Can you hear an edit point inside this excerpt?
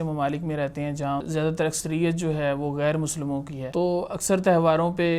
yes; 2 cuts; at 1.2 s, 3.6 s

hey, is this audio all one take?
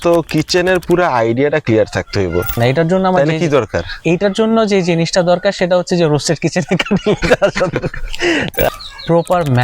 no; 2 cuts; at 2.6 s, 8.7 s

